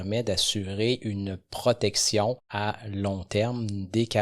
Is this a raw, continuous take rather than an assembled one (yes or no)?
no